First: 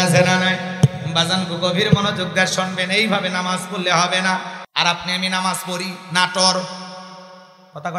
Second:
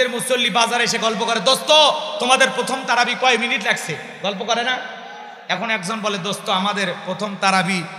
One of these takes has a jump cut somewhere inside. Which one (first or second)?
first